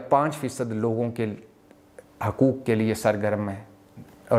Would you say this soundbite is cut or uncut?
uncut